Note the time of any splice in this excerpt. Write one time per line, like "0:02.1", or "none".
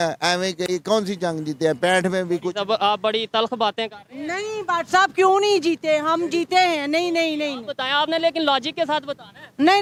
none